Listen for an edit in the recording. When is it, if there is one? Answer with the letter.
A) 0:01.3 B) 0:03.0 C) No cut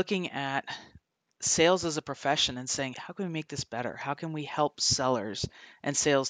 B